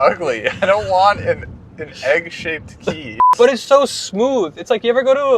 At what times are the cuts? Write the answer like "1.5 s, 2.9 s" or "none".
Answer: 3.3 s